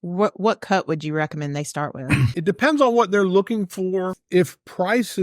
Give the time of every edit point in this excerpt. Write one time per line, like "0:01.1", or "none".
0:02.3
0:04.2